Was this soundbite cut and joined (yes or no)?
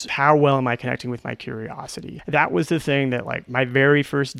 yes